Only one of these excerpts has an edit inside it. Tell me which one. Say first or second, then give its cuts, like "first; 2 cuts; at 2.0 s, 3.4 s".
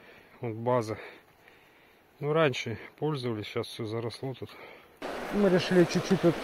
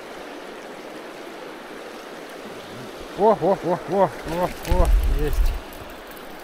first; 1 cut; at 5.0 s